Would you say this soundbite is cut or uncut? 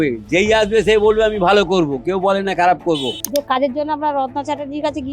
cut